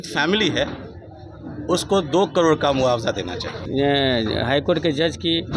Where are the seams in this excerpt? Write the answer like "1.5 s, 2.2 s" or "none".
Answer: 3.6 s